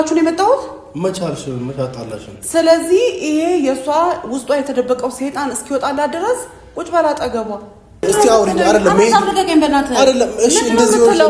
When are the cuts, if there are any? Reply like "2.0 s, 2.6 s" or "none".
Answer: 8.1 s